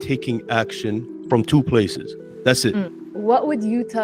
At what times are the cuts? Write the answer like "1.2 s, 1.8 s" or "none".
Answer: 1.2 s, 3.0 s